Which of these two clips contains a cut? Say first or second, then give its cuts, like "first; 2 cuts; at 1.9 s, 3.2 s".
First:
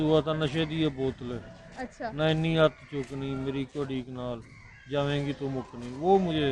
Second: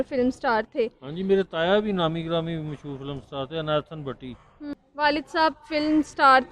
second; 1 cut; at 4.7 s